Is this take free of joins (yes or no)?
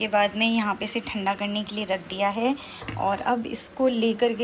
yes